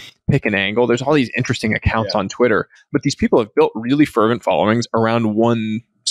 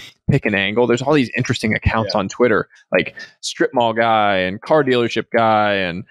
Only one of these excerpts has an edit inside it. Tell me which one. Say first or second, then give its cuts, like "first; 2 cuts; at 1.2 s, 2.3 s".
first; 1 cut; at 2.8 s